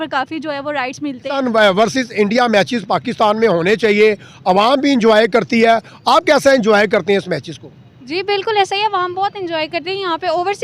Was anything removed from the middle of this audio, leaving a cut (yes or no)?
yes